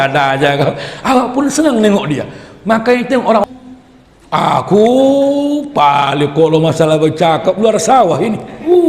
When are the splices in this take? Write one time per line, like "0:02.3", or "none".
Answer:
0:03.4